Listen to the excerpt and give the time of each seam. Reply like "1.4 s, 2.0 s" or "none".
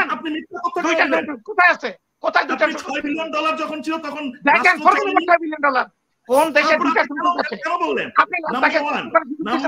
none